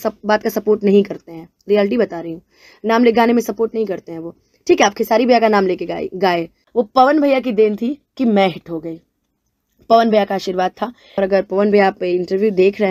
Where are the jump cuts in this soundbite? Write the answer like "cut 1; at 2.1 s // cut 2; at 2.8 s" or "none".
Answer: cut 1; at 6.6 s // cut 2; at 11.2 s